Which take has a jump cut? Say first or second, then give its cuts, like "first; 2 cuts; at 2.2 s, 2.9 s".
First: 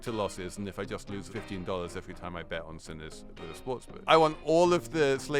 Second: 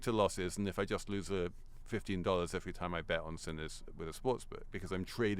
first; 2 cuts; at 1.2 s, 4.0 s